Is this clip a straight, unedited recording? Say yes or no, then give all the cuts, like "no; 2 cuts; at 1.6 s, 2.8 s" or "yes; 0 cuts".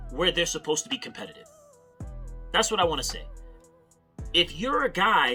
yes; 0 cuts